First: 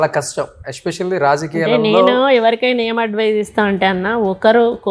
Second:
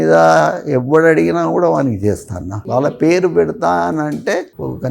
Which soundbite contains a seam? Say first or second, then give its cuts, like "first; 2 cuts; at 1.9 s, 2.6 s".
second; 1 cut; at 3.0 s